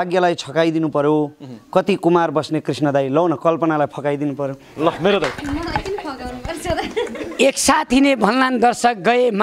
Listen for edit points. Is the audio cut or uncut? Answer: uncut